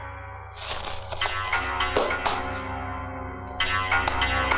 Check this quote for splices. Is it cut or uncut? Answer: uncut